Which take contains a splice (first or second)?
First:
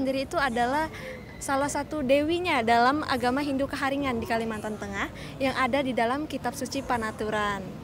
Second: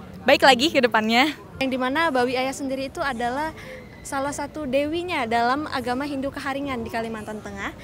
second